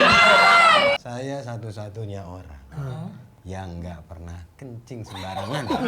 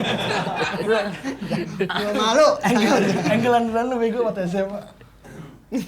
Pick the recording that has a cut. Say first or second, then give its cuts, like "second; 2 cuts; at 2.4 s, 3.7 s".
first; 1 cut; at 1.0 s